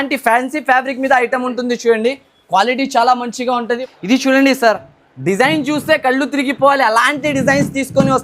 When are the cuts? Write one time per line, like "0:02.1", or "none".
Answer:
0:03.7